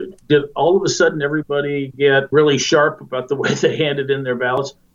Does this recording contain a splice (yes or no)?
yes